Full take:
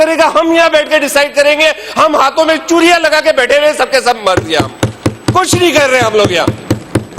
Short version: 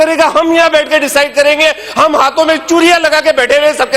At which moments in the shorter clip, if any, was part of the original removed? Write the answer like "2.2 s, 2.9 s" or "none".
none